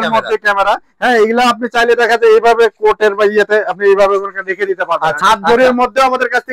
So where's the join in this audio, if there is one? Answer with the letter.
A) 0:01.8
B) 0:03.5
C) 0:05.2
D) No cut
C